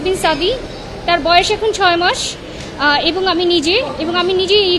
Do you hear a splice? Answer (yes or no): no